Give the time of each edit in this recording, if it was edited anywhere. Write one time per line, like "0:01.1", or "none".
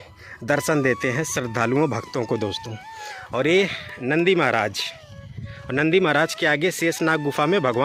none